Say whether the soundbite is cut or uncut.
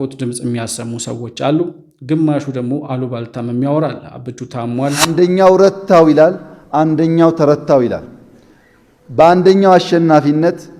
cut